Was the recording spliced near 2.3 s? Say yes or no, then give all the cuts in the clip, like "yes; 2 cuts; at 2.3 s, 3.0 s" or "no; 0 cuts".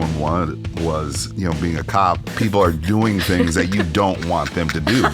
yes; 2 cuts; at 1.2 s, 2.3 s